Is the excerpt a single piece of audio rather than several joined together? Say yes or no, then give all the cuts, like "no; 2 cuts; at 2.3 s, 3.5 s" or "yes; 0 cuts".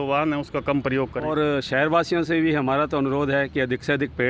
no; 1 cut; at 1.3 s